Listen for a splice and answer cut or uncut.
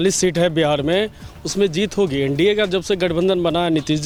uncut